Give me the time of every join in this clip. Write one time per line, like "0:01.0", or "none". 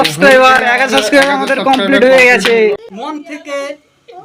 0:03.1